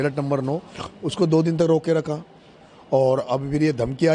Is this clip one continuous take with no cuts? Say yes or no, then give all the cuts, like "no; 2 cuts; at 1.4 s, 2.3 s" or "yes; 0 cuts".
yes; 0 cuts